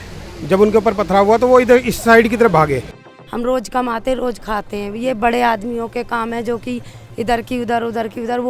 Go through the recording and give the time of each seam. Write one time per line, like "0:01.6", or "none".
0:03.0